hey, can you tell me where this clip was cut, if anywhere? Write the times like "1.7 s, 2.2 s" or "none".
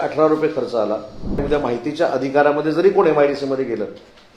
1.4 s